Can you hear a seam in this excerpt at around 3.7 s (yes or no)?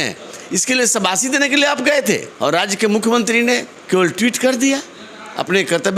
yes